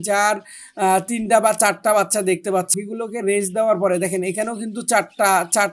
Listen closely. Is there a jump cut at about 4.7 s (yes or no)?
no